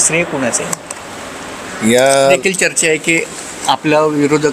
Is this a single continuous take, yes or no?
no